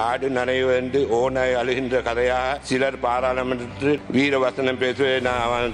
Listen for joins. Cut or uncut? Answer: uncut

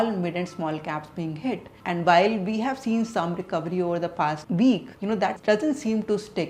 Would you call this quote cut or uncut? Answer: uncut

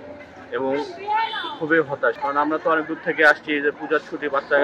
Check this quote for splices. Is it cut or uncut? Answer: cut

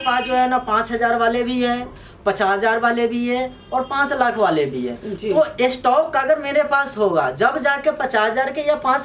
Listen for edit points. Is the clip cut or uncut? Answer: uncut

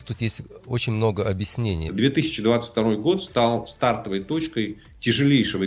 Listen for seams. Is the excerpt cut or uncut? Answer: cut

